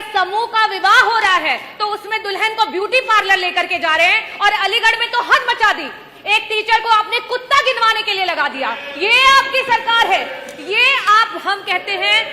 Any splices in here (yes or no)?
no